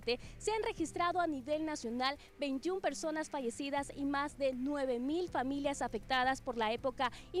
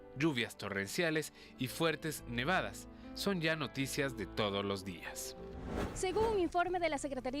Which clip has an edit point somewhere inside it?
second; 1 cut; at 5.9 s

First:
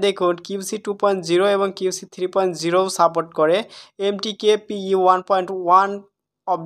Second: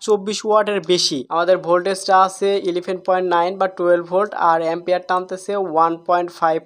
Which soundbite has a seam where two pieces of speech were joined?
second; 1 cut; at 1.1 s

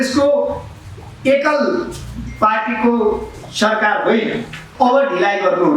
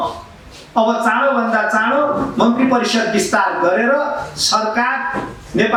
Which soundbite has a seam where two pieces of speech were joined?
first; 1 cut; at 4.6 s

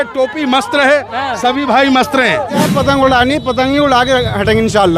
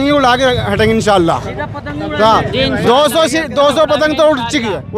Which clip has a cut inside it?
first; 1 cut; at 2.7 s

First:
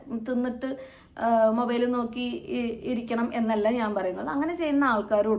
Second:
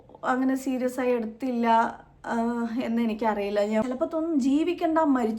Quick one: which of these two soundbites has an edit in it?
second; 1 cut; at 3.8 s

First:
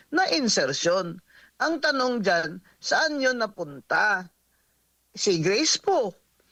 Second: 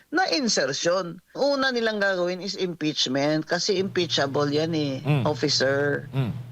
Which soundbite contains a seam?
second; 1 cut; at 1.4 s

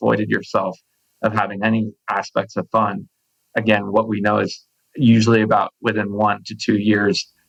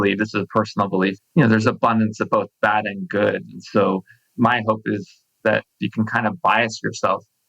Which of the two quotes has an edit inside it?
second; 2 cuts; at 1.2 s, 5.8 s

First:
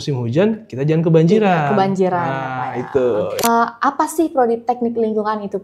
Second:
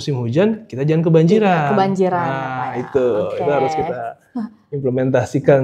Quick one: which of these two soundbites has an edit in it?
first; 1 cut; at 3.4 s

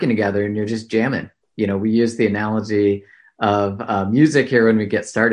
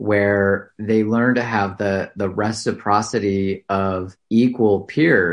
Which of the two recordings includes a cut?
second; 1 cut; at 4.1 s

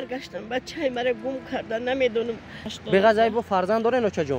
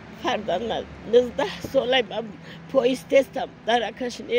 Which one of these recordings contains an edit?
first; 1 cut; at 2.7 s

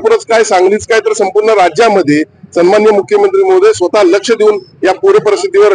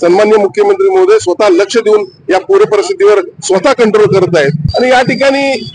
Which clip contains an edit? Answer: second; 1 cut; at 4.6 s

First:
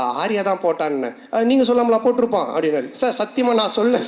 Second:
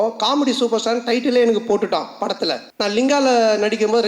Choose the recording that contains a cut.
second; 1 cut; at 2.7 s

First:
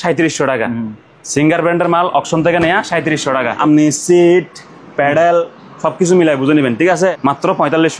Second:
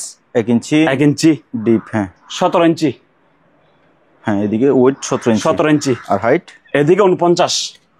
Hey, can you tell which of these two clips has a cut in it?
first; 2 cuts; at 3.6 s, 7.2 s

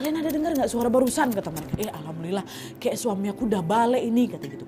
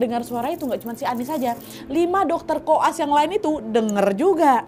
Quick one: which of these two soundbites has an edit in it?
first; 1 cut; at 1.6 s

